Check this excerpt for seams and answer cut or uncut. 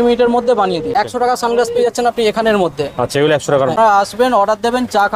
cut